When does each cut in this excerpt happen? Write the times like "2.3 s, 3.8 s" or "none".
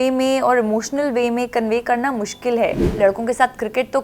2.8 s

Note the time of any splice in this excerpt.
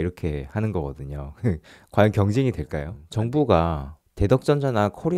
3.0 s

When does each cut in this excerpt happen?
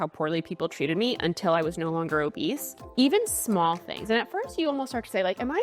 2.7 s

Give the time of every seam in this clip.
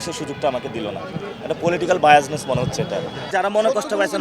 3.2 s

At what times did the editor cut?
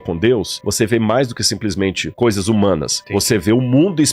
3.0 s

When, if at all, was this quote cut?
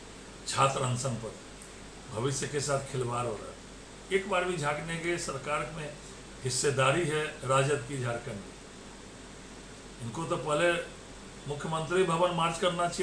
none

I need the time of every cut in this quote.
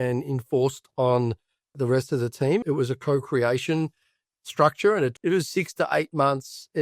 2.6 s, 5.2 s

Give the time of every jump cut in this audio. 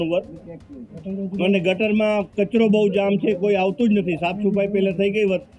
none

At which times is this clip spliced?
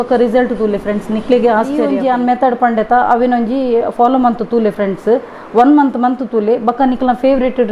1.9 s

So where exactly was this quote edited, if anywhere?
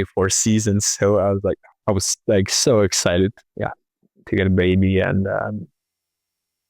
1.7 s, 3.5 s

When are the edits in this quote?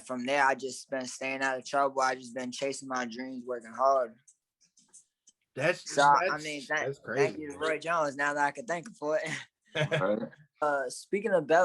10.6 s

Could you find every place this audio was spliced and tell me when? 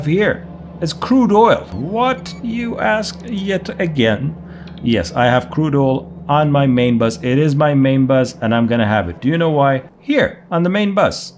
9.9 s

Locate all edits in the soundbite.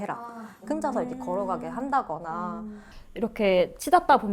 3.1 s

